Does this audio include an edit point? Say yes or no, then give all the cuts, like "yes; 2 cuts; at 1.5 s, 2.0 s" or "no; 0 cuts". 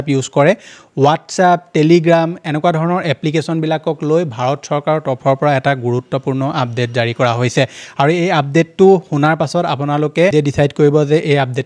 no; 0 cuts